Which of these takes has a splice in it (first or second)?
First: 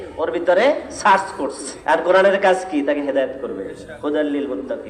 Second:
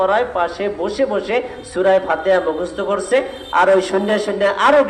first